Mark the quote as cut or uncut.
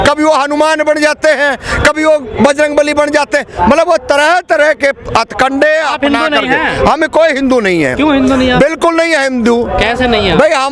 uncut